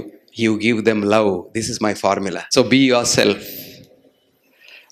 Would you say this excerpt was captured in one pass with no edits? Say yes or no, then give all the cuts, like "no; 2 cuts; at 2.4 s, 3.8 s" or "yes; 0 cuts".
no; 1 cut; at 2.4 s